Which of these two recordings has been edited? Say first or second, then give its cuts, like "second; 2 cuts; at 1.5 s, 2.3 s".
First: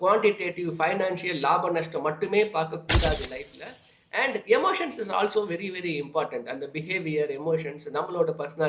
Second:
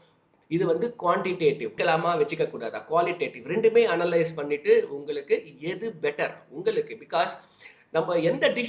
second; 1 cut; at 1.7 s